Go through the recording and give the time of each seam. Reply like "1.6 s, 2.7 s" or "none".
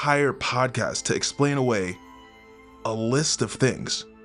none